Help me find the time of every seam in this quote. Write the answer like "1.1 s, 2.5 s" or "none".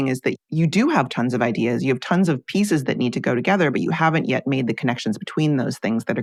none